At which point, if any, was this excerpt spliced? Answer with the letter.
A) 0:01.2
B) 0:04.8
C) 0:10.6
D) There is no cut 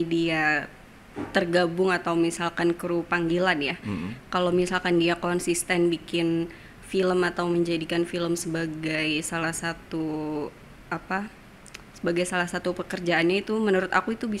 D